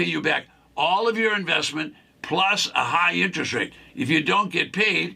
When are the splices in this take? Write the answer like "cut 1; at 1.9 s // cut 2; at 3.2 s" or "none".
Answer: cut 1; at 3.8 s

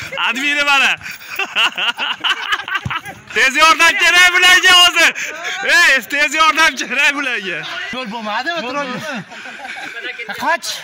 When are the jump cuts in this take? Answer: cut 1; at 3.3 s // cut 2; at 7.8 s

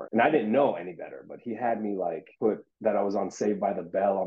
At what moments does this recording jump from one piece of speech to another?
cut 1; at 2.5 s

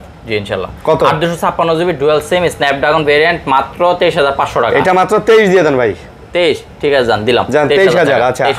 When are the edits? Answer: none

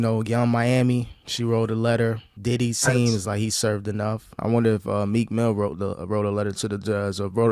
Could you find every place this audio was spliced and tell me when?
cut 1; at 1.2 s // cut 2; at 2.3 s // cut 3; at 4.4 s

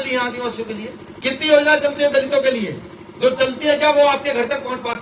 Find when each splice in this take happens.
cut 1; at 1.1 s

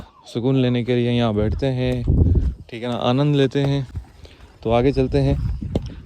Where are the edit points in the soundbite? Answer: none

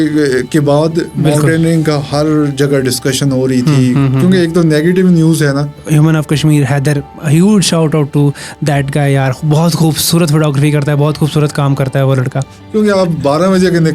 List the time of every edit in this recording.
cut 1; at 5.8 s // cut 2; at 12.5 s

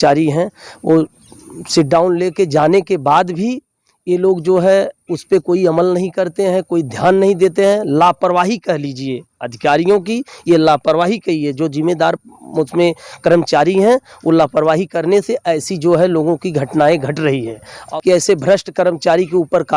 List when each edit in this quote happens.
cut 1; at 17.8 s

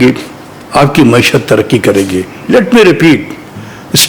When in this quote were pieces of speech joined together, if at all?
none

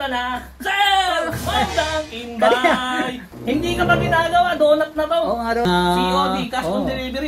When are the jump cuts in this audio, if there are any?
cut 1; at 3.2 s // cut 2; at 5.6 s

